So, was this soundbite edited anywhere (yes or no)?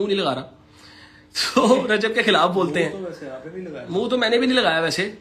no